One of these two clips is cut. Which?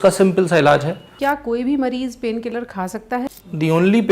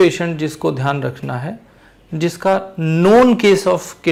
first; 2 cuts; at 1.1 s, 3.2 s

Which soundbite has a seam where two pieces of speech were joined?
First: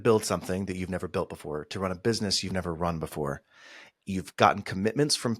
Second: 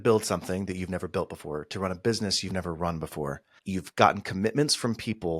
second; 1 cut; at 3.5 s

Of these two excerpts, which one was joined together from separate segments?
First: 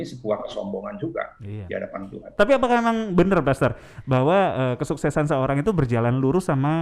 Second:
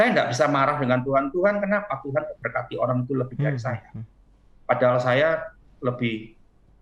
first; 1 cut; at 2.2 s

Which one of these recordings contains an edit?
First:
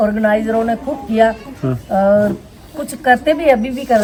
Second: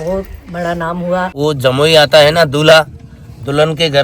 second; 1 cut; at 1.3 s

